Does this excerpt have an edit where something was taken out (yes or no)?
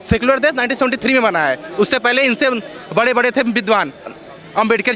no